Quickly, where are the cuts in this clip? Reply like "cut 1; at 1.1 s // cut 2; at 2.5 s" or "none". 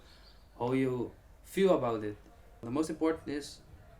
cut 1; at 2.6 s